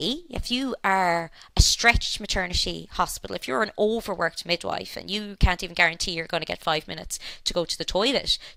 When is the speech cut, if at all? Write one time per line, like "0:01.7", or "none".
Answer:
none